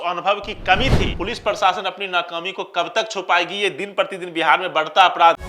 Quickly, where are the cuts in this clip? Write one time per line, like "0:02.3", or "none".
0:01.1